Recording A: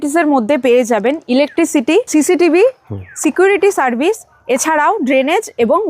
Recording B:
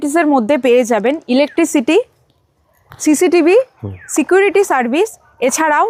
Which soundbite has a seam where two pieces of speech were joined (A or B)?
A